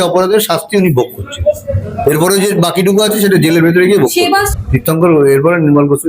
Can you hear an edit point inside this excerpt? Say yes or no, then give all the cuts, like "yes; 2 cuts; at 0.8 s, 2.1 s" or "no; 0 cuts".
yes; 2 cuts; at 1.7 s, 4.5 s